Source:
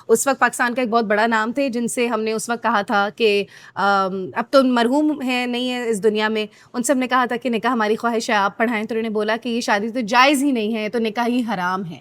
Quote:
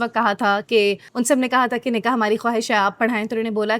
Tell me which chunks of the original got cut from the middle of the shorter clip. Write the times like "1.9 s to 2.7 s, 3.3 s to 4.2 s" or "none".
3.5 s to 6.6 s